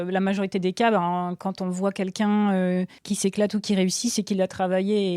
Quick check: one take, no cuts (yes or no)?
no